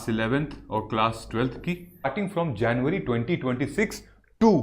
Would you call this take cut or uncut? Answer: cut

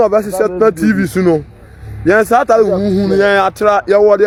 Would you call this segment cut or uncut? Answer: uncut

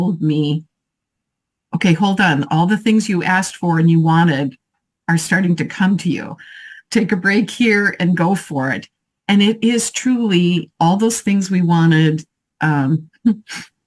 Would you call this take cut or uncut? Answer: uncut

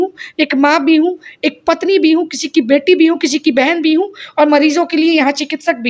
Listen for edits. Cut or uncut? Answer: uncut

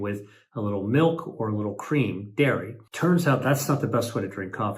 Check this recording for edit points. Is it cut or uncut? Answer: cut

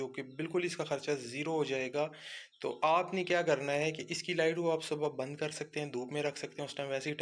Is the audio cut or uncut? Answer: uncut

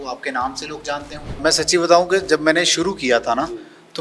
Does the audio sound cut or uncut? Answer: cut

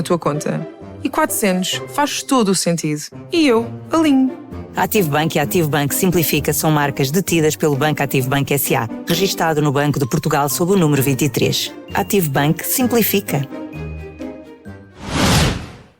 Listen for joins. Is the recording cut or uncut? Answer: cut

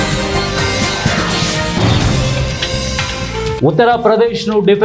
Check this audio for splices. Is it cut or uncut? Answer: uncut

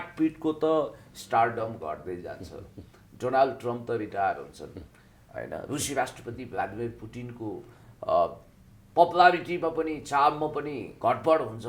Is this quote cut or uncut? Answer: uncut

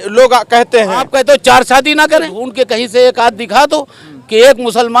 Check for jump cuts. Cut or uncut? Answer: cut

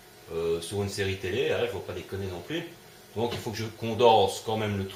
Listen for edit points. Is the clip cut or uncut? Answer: uncut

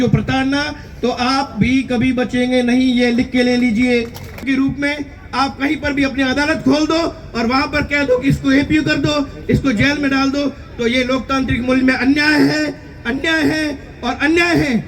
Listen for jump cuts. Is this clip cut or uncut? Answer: cut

